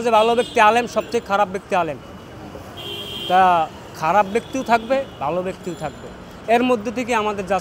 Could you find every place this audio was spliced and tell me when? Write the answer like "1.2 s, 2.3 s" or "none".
none